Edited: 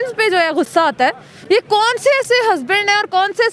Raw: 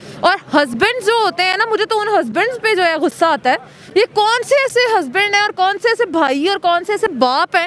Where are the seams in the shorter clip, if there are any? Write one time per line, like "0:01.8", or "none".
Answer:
none